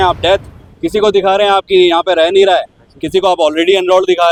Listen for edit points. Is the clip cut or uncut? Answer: uncut